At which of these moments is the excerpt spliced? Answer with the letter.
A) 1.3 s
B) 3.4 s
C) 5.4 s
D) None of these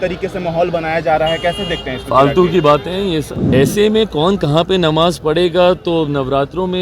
B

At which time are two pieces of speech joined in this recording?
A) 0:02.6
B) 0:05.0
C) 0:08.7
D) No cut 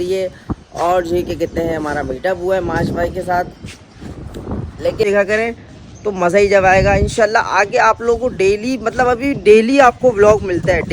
B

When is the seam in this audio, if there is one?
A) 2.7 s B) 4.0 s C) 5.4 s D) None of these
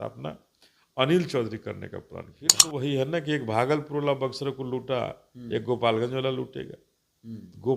A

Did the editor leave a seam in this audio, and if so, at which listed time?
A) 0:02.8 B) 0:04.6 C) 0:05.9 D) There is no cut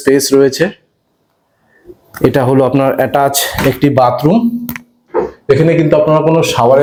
D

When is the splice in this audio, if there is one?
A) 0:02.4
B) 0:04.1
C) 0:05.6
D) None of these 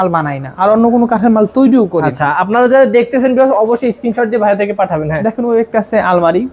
D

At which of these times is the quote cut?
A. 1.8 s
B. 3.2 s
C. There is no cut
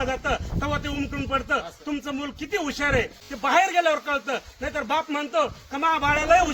B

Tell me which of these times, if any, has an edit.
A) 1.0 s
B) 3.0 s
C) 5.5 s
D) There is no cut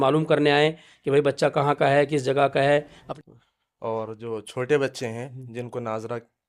B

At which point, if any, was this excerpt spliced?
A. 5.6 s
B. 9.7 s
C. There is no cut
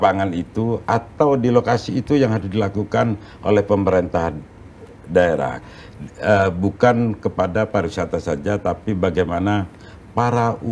A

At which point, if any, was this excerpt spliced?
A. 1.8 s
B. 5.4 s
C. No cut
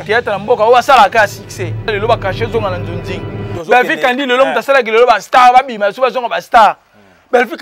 A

